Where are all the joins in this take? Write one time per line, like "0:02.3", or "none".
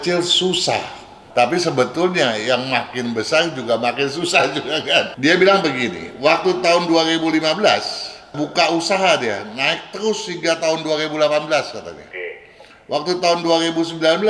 0:01.1
0:05.1